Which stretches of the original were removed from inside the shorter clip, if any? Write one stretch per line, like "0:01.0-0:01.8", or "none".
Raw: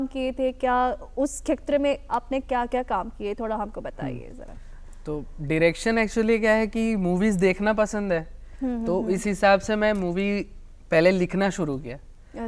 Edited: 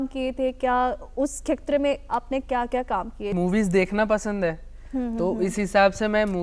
0:03.3-0:07.0